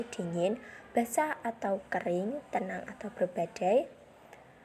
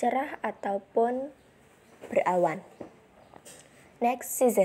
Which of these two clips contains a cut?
first; 1 cut; at 1.1 s

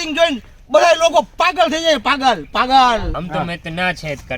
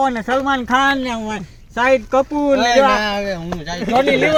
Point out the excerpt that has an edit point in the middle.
first; 1 cut; at 3.1 s

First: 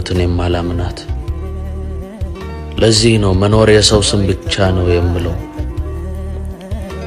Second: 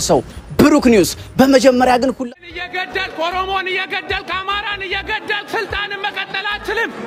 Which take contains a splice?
second; 1 cut; at 2.2 s

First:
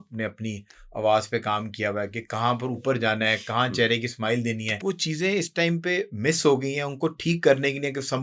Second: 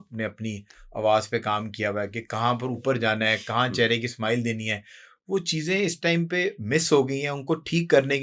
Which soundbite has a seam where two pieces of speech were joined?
first; 1 cut; at 4.7 s

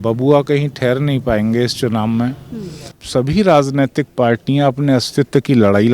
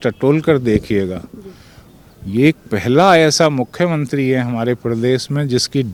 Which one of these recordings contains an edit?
first; 1 cut; at 2.9 s

